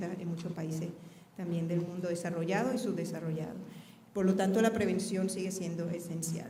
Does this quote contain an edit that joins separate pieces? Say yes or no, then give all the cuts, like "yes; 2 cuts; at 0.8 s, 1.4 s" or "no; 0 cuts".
no; 0 cuts